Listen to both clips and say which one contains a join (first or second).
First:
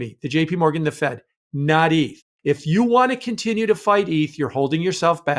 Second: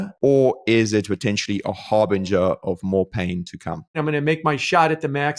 second